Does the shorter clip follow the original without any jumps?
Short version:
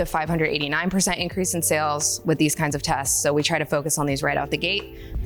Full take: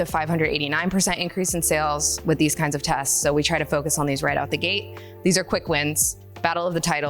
yes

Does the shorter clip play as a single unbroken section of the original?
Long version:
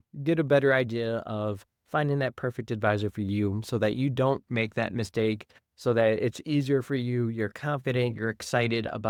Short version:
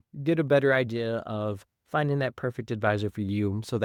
yes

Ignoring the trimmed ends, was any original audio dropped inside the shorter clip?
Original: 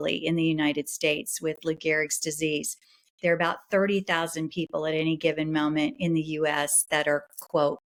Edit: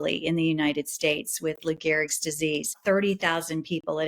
yes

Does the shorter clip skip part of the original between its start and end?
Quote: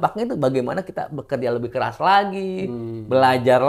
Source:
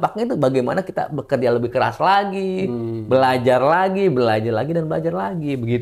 no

